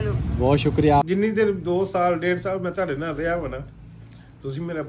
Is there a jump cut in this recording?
yes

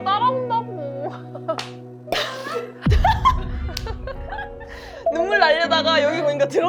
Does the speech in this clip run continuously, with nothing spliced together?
yes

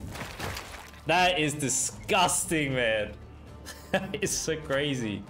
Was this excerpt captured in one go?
yes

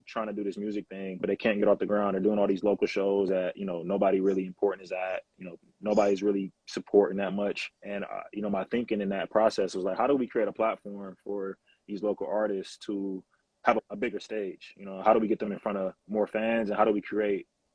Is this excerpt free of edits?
yes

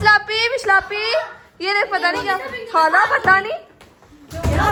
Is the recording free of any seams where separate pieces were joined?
yes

